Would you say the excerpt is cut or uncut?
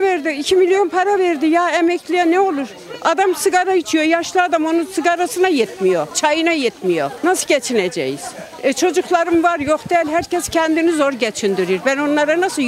uncut